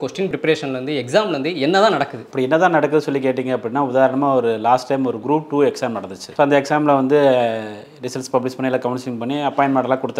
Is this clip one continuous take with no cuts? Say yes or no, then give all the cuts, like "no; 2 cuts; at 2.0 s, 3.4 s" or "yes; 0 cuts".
yes; 0 cuts